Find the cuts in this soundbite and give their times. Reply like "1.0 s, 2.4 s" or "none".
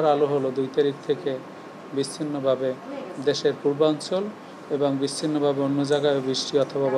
none